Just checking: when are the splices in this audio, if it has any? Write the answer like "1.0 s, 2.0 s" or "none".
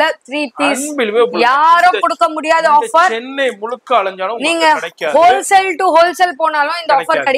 none